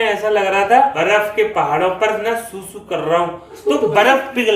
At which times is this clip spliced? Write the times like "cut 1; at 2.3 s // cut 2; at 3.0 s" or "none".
cut 1; at 0.9 s // cut 2; at 3.7 s